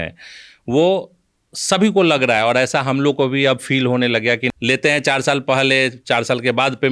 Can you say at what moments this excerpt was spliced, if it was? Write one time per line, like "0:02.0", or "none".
0:04.4